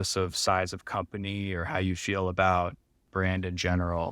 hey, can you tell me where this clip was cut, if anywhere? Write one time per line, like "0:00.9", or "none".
0:03.1